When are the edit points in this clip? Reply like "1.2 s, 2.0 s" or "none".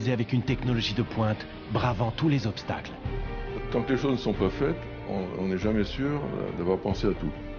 none